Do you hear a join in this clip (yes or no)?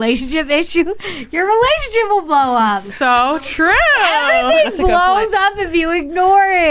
no